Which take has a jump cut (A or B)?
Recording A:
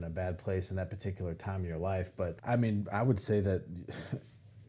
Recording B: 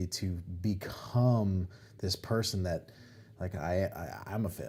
A